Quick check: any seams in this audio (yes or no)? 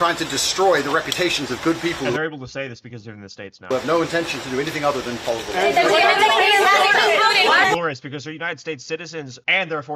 no